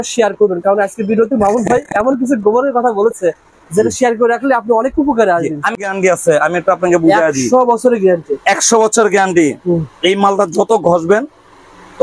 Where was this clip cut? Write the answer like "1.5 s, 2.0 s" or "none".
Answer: 5.8 s